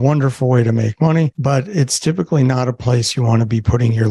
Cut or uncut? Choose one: cut